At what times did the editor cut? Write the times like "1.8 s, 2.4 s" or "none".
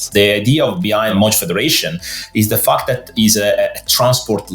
1.1 s

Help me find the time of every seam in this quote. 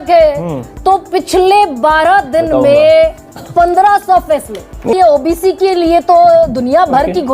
4.9 s

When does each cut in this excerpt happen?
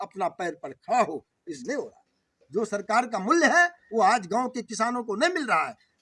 1.6 s

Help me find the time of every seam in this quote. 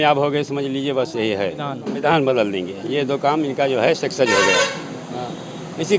1.9 s

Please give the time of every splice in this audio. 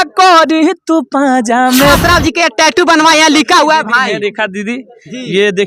2.0 s

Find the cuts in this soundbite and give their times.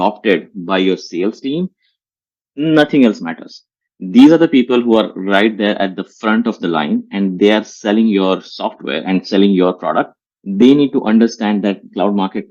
none

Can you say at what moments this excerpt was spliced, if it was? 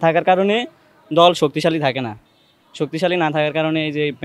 none

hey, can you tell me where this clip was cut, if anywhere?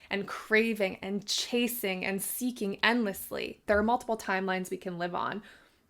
3.6 s

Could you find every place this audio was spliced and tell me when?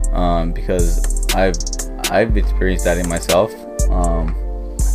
none

